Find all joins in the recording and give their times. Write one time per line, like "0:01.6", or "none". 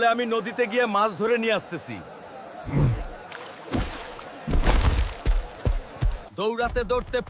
0:06.2